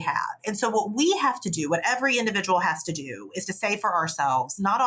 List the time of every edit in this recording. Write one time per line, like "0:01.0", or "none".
none